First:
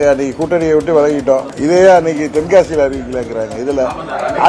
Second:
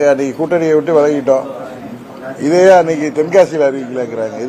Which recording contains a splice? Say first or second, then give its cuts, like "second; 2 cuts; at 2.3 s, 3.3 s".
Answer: first; 1 cut; at 1.5 s